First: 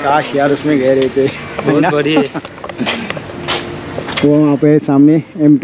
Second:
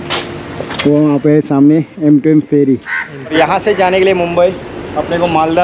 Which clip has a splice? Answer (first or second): second